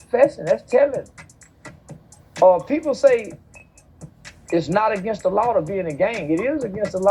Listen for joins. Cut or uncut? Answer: uncut